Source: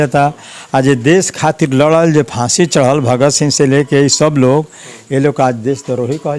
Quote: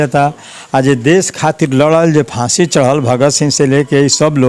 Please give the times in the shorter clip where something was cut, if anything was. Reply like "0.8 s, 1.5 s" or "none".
none